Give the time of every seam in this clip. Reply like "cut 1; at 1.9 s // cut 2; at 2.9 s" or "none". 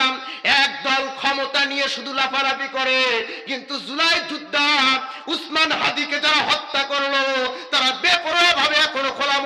none

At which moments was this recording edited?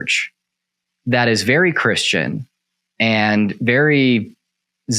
none

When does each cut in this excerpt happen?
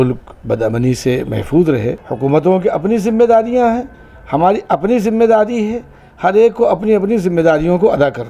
cut 1; at 2.0 s

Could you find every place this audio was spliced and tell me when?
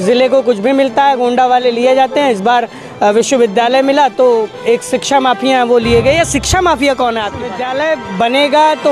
cut 1; at 7.6 s

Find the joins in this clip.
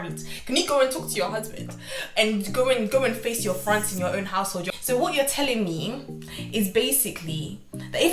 cut 1; at 4.6 s

